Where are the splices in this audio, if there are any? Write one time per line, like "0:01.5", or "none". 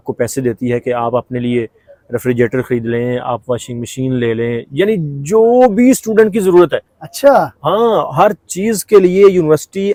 none